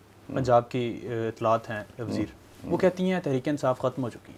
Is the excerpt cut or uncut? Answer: uncut